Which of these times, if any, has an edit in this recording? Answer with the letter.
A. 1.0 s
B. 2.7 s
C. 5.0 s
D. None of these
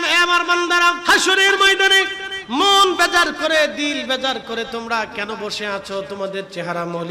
A